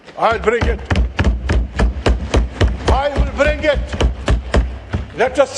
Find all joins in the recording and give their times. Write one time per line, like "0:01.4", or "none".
none

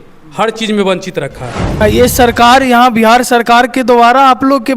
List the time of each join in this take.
0:01.8

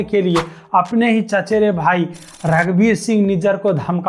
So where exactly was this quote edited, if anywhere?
none

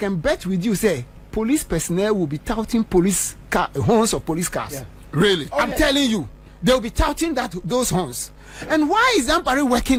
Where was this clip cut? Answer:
none

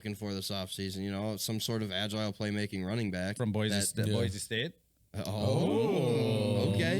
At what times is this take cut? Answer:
none

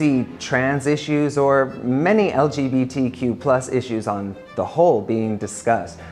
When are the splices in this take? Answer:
none

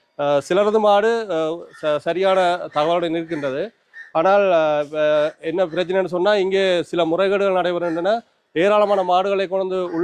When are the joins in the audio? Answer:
none

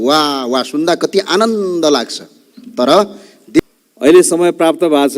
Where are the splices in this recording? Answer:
0:03.6

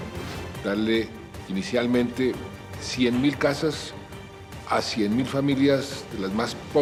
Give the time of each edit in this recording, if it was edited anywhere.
none

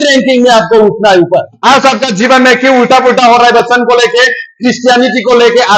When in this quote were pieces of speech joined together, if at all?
0:01.5

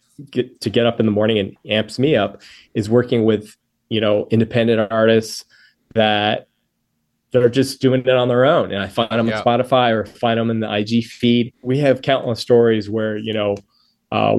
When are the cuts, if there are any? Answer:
0:11.6

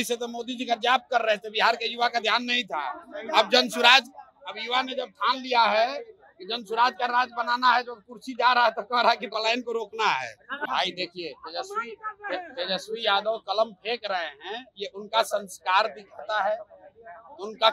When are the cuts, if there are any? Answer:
0:10.5

